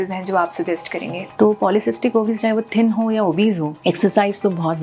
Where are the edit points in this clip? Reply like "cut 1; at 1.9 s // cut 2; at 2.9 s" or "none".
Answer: cut 1; at 1.3 s // cut 2; at 3.8 s